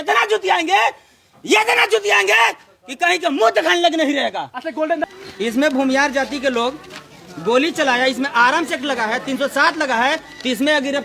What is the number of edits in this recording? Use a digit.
1